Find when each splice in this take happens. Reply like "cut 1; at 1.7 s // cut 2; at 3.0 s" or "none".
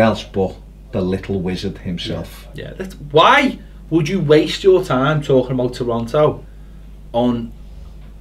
cut 1; at 7.1 s